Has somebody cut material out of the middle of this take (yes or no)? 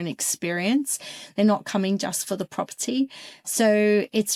no